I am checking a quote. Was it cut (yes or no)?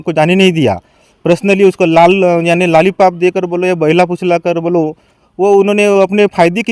no